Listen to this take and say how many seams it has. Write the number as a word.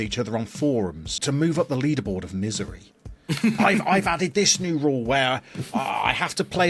one